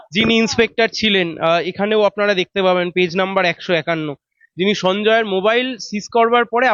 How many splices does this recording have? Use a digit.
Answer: 0